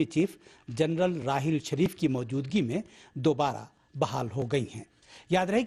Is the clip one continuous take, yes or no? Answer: yes